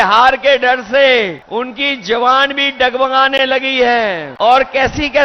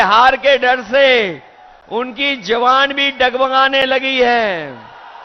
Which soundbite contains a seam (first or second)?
first